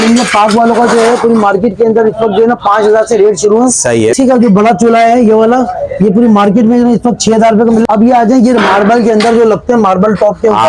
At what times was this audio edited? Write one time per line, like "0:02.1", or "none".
0:04.1
0:07.8